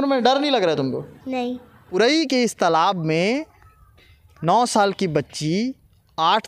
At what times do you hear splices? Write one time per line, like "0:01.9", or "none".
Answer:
0:01.8